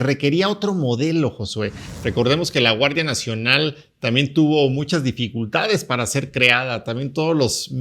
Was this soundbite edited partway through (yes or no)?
yes